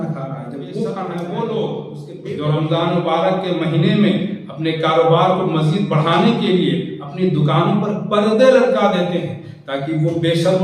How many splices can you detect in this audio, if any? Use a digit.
1